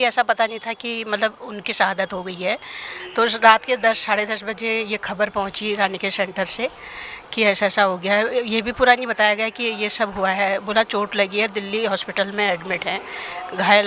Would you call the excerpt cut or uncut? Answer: uncut